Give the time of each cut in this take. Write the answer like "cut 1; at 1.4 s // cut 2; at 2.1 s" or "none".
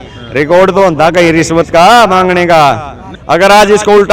cut 1; at 3.1 s